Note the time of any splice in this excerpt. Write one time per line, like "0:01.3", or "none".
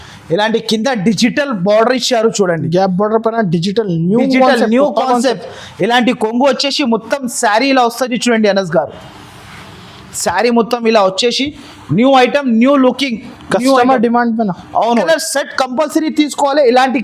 0:15.0